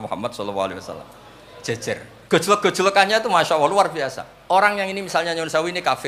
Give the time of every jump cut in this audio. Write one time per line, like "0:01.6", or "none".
0:02.1
0:04.3